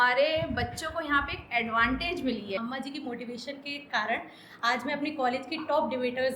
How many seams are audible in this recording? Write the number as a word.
one